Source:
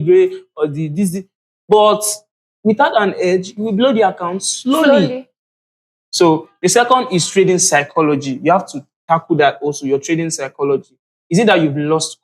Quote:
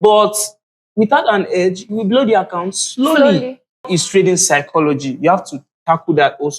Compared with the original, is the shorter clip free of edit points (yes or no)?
no